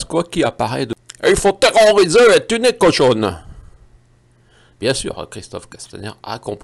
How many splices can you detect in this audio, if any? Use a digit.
1